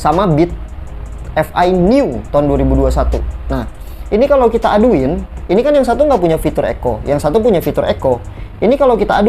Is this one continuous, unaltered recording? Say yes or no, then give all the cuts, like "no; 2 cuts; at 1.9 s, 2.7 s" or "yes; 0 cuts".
yes; 0 cuts